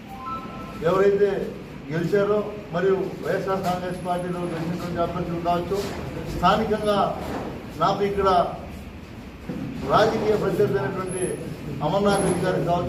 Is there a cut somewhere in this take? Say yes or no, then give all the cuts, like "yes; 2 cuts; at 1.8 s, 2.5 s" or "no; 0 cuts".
no; 0 cuts